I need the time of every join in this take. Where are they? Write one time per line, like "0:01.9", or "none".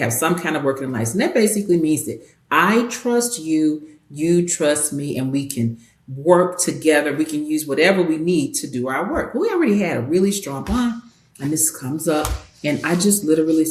none